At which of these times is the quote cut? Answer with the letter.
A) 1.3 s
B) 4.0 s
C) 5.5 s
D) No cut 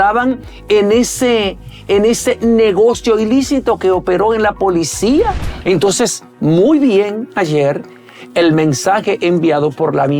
C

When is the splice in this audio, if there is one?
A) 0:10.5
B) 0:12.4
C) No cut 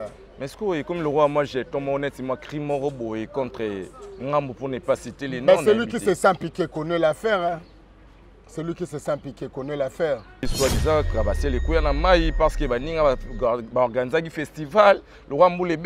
A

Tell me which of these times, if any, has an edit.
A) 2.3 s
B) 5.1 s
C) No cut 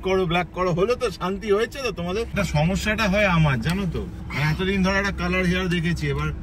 A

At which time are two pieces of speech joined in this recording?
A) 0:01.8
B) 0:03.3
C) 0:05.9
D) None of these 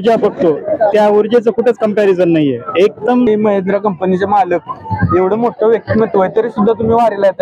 B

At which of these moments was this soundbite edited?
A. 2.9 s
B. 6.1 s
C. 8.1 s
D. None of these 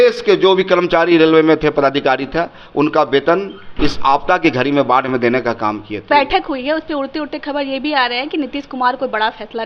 B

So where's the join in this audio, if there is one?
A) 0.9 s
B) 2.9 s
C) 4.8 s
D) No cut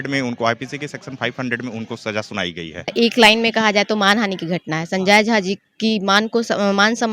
B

